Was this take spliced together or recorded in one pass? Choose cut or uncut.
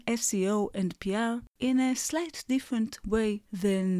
uncut